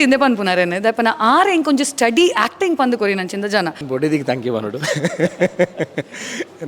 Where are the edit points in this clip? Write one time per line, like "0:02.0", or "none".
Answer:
0:03.8